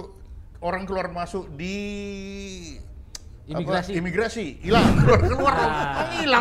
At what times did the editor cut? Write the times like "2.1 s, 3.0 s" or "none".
5.0 s